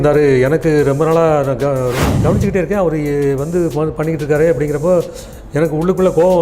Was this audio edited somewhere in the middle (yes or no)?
yes